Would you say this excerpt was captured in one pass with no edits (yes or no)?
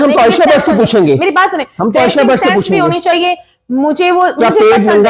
yes